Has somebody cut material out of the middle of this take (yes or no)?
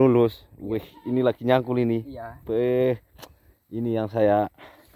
no